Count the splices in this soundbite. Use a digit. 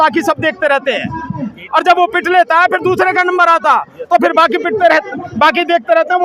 0